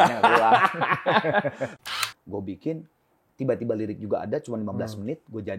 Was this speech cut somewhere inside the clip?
yes; 1 cut; at 1.8 s

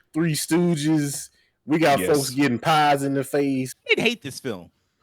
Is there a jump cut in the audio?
yes; 1 cut; at 3.7 s

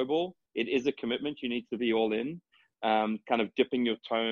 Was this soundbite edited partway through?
no; 0 cuts

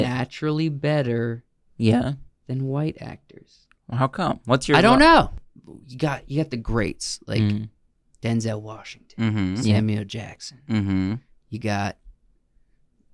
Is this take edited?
yes; 1 cut; at 5.4 s

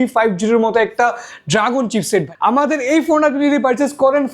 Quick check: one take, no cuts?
no; 1 cut; at 2.3 s

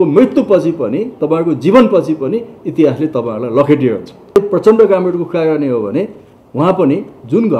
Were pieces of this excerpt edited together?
yes; 1 cut; at 4.4 s

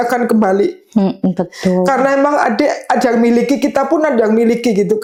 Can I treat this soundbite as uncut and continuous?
yes; 0 cuts

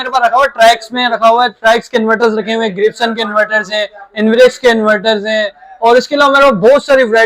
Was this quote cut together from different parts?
no; 0 cuts

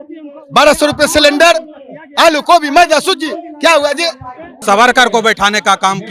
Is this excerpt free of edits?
no; 1 cut; at 4.5 s

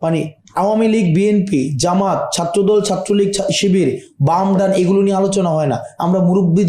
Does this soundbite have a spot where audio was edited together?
no; 0 cuts

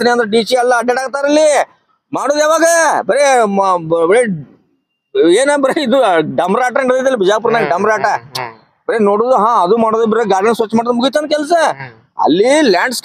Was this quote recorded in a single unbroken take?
yes; 0 cuts

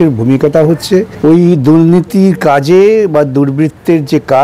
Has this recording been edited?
yes; 1 cut; at 1.1 s

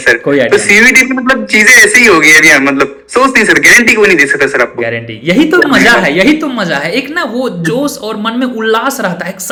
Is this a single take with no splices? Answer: yes; 0 cuts

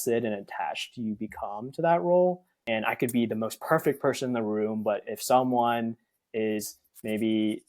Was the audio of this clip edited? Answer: yes; 1 cut; at 2.5 s

